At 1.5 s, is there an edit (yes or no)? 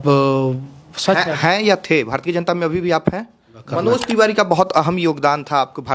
no